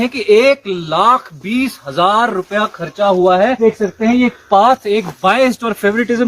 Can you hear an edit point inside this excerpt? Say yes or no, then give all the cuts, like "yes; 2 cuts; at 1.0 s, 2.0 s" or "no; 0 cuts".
yes; 1 cut; at 3.6 s